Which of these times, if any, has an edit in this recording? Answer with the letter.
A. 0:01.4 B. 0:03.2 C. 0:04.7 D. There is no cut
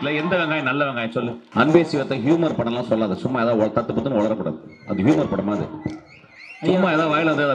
A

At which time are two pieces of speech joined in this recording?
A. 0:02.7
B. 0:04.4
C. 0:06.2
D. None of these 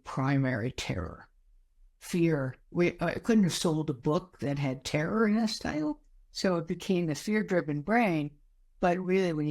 C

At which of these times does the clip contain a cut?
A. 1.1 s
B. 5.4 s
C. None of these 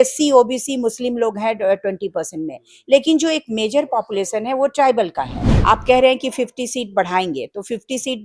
B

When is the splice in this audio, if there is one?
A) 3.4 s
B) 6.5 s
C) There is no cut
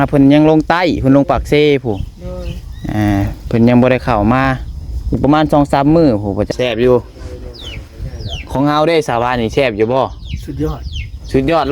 B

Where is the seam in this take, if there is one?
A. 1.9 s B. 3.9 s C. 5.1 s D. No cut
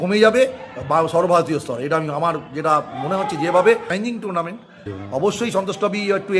B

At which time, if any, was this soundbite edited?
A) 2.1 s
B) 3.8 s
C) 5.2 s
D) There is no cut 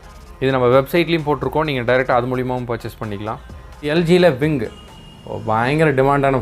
B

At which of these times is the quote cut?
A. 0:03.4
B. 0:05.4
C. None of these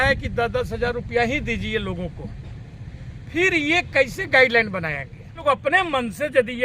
B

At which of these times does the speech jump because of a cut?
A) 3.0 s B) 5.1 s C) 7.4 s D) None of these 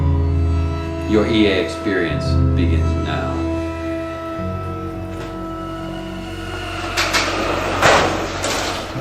D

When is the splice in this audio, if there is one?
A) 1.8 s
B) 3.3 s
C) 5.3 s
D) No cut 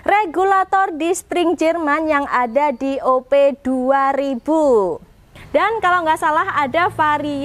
C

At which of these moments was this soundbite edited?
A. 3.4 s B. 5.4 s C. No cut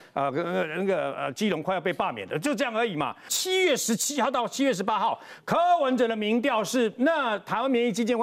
A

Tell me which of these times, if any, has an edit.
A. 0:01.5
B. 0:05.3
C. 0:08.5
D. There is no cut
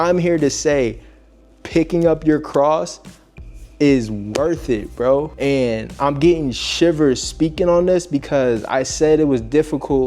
B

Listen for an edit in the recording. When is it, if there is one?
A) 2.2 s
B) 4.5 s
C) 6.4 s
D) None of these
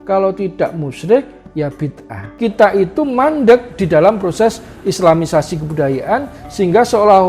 A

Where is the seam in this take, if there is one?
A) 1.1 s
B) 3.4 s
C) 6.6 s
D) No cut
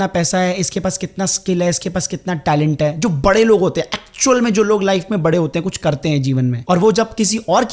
C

